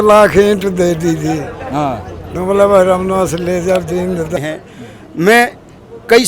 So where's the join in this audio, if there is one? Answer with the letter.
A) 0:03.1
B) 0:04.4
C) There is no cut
B